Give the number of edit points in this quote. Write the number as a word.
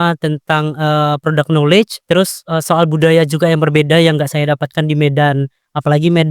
one